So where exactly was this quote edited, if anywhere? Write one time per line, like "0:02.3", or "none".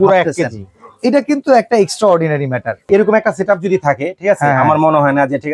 0:02.8